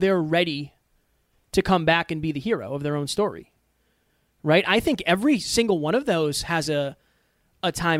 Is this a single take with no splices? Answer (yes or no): yes